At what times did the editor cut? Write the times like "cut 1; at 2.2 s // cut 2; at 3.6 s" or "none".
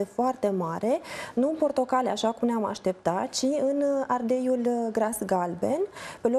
cut 1; at 3.8 s